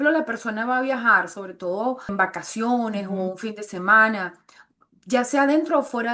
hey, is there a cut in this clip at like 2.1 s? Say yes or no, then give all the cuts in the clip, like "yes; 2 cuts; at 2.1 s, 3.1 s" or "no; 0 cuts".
yes; 1 cut; at 2.1 s